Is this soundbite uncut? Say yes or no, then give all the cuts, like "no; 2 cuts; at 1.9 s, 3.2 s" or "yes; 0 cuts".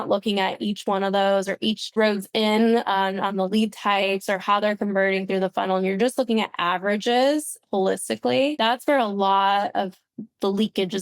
no; 2 cuts; at 1.9 s, 8.6 s